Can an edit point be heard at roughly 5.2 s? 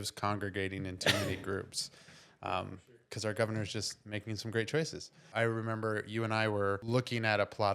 yes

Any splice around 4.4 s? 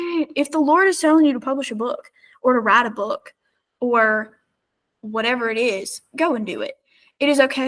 no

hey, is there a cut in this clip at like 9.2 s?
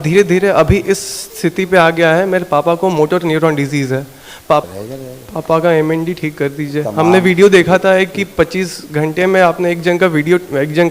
no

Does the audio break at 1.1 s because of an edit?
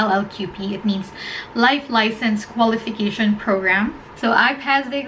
no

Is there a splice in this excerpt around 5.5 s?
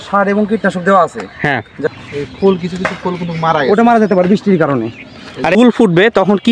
yes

